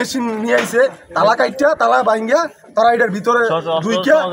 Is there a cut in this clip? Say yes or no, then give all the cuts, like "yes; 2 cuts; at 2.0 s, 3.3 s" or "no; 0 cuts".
no; 0 cuts